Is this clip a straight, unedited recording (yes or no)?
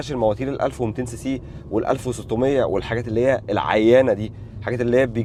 yes